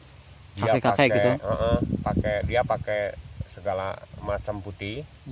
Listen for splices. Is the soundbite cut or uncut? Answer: uncut